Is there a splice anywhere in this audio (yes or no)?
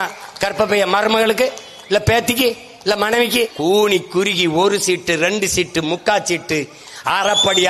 yes